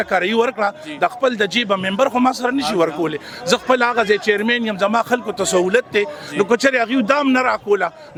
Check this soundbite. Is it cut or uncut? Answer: uncut